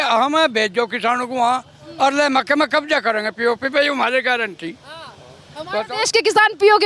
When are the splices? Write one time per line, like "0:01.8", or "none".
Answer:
none